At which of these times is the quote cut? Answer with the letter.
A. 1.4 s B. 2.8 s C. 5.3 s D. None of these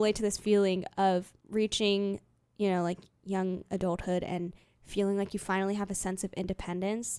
A